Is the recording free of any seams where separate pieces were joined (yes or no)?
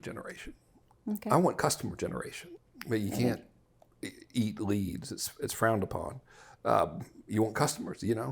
no